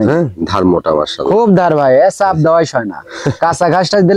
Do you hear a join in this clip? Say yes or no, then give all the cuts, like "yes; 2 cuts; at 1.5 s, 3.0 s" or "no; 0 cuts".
no; 0 cuts